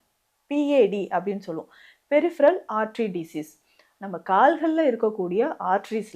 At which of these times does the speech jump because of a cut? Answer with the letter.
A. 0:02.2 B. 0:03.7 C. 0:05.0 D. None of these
D